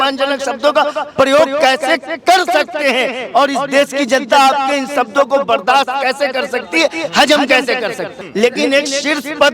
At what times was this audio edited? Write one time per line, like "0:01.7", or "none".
0:08.1